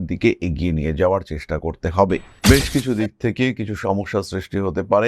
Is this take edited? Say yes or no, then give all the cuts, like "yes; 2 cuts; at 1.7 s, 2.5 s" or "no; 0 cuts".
yes; 1 cut; at 2.3 s